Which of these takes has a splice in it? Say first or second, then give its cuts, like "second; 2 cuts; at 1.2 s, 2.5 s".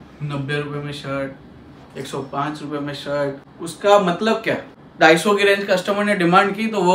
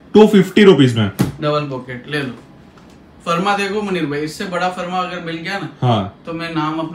first; 2 cuts; at 3.5 s, 4.8 s